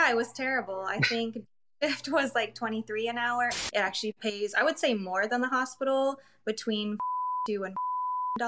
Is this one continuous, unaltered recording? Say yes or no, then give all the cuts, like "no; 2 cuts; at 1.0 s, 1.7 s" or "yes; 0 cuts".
no; 1 cut; at 3.6 s